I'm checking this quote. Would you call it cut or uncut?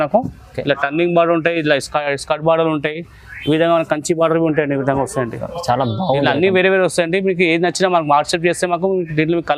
uncut